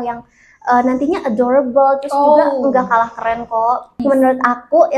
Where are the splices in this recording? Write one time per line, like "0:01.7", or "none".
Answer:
0:03.9